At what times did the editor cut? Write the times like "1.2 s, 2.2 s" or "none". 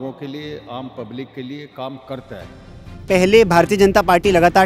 3.0 s